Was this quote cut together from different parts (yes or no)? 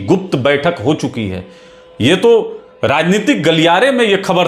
no